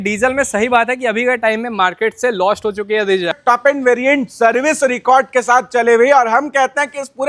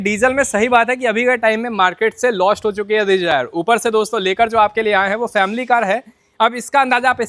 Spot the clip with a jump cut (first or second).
first